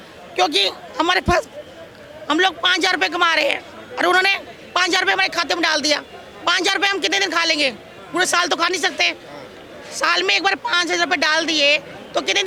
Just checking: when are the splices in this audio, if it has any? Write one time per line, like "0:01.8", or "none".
none